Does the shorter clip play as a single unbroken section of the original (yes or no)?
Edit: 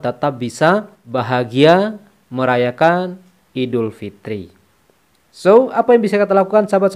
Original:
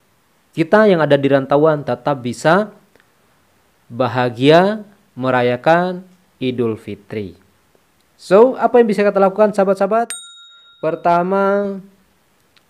no